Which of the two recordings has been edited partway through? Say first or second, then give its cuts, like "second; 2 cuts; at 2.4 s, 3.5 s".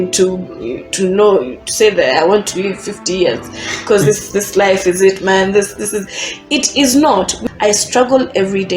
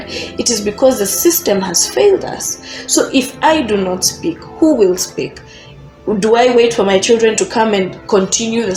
first; 1 cut; at 7.4 s